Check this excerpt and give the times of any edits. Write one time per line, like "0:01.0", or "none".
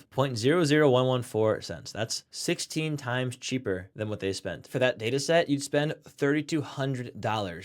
0:02.2
0:04.7